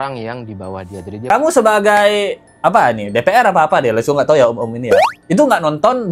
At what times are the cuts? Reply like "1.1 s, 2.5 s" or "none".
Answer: 1.2 s